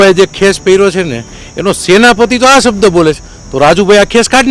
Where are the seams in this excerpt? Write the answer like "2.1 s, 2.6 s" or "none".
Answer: none